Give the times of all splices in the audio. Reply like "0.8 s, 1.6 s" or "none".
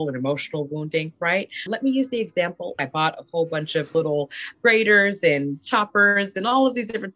1.7 s, 2.8 s